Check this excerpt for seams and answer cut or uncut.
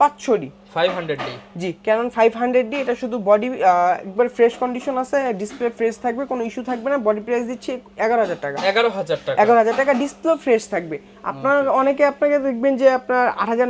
uncut